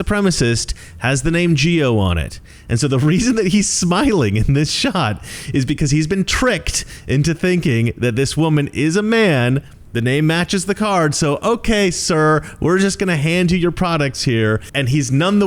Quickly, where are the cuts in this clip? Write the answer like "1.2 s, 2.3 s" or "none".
none